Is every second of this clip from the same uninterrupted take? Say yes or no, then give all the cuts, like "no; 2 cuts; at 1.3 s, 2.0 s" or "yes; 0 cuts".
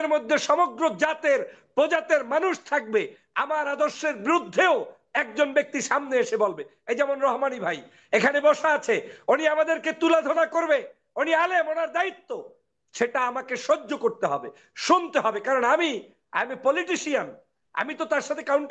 yes; 0 cuts